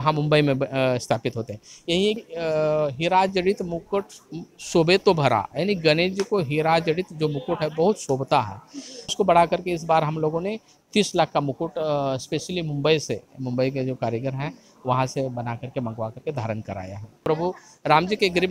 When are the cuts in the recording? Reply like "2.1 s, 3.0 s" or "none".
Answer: 2.2 s, 9.1 s, 17.1 s